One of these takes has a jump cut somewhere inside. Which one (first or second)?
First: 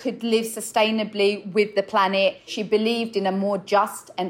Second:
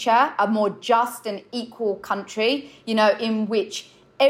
first